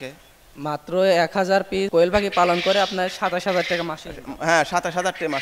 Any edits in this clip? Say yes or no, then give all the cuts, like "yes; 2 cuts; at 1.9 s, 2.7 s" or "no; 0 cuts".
yes; 1 cut; at 1.9 s